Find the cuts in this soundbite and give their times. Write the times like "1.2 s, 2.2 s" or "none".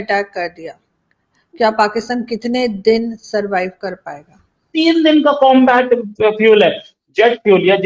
4.7 s